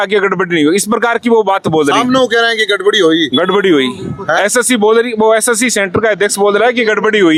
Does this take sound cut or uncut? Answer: uncut